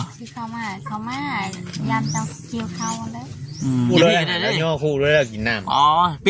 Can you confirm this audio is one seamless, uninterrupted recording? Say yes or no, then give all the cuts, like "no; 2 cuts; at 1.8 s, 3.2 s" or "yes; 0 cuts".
no; 1 cut; at 3.9 s